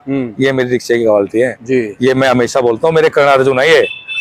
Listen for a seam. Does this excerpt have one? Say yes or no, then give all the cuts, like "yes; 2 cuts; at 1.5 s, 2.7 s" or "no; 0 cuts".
no; 0 cuts